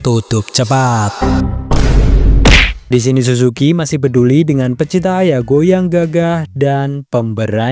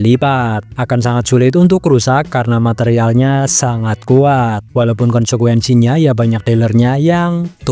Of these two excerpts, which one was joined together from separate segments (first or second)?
first